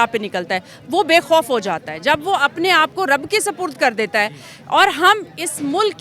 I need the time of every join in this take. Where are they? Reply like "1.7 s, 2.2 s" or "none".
none